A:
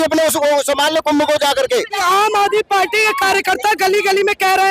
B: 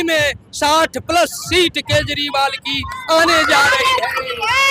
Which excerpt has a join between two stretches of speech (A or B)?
A